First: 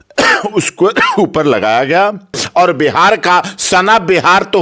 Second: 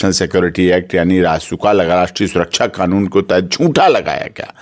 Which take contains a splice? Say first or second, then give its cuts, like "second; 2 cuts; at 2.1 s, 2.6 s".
first; 1 cut; at 2.4 s